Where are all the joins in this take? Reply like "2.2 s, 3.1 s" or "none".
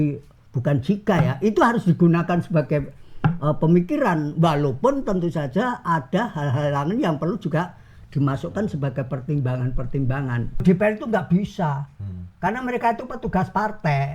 10.6 s

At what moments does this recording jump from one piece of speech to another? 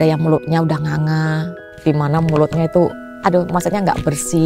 1.7 s, 3.1 s

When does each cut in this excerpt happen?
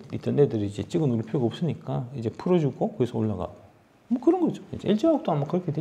none

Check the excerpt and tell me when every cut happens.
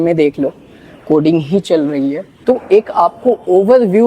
2.3 s

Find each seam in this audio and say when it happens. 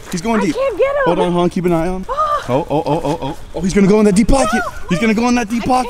2.0 s, 3.4 s

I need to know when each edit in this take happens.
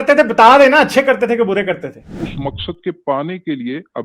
2.2 s

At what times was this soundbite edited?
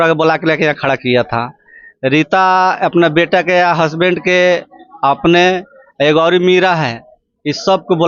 none

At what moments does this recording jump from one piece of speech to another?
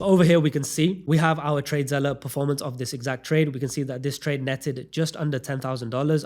1.0 s

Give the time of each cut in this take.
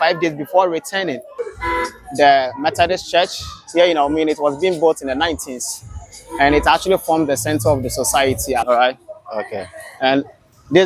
1.3 s, 8.6 s

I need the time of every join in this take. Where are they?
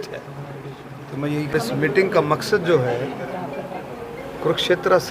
1.5 s

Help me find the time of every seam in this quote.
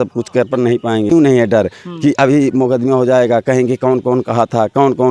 1.1 s

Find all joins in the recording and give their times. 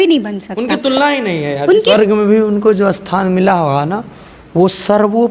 1.9 s

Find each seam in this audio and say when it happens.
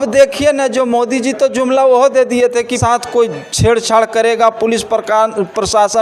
2.7 s

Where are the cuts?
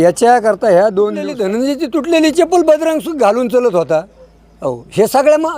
1.3 s

